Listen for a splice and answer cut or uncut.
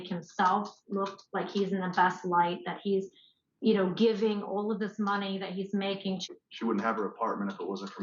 cut